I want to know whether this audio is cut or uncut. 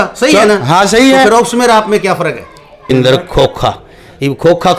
cut